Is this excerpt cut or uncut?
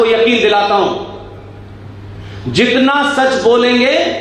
uncut